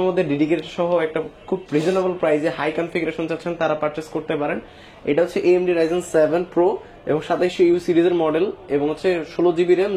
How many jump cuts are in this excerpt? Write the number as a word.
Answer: zero